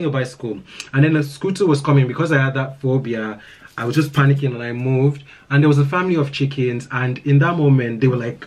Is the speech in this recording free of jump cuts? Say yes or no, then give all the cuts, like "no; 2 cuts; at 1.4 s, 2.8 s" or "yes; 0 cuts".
yes; 0 cuts